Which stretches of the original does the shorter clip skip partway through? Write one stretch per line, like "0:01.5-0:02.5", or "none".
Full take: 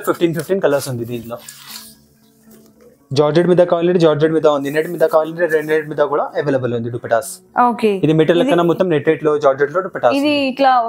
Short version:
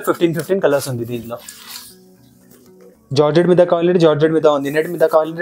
none